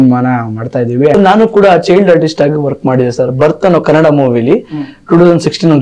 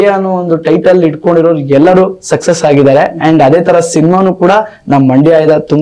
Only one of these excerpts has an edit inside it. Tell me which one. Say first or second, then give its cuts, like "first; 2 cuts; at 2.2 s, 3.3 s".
first; 1 cut; at 1.1 s